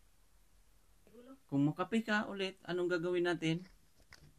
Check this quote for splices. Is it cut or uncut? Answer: cut